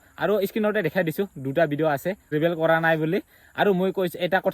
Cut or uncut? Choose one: cut